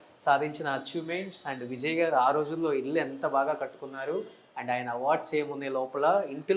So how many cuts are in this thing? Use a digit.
0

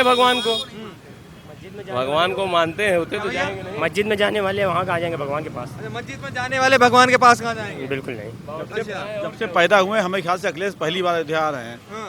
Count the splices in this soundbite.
0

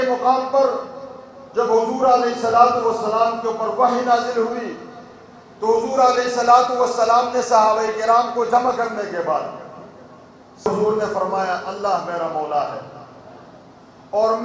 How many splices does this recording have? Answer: 1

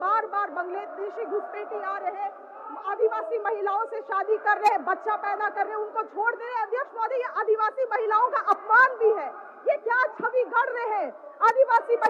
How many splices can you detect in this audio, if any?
0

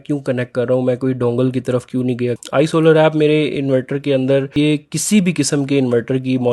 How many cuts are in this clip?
2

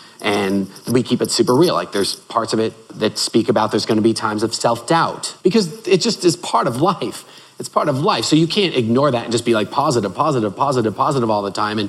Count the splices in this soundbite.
3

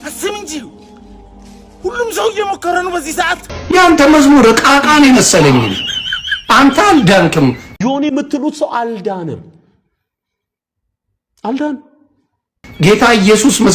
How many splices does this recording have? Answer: 1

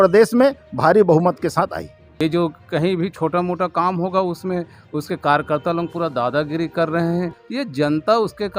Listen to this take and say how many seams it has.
2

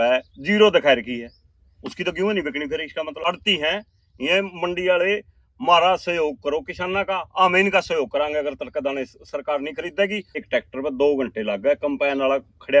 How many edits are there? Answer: 2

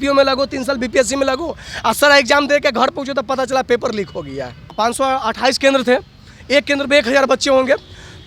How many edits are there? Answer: 1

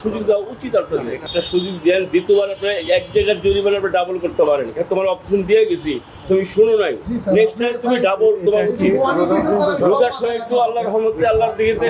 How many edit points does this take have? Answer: 0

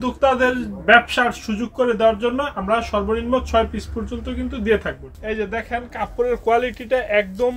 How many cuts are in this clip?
1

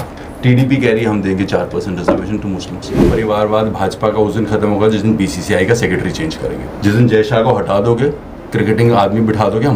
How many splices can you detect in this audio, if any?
2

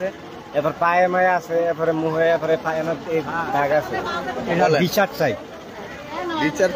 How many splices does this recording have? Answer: 0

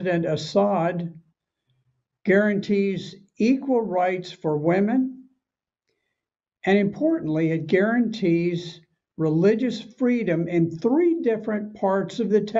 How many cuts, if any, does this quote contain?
0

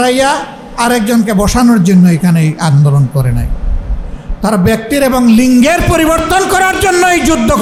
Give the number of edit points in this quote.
0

